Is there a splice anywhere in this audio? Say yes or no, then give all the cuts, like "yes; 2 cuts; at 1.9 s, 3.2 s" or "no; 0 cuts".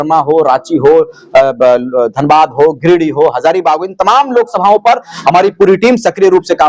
no; 0 cuts